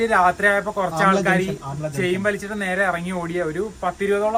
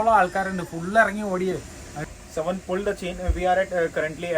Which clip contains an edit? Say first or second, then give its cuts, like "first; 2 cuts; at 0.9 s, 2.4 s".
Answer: second; 1 cut; at 2.0 s